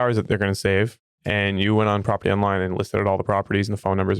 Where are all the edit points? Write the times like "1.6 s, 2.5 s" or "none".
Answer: 1.0 s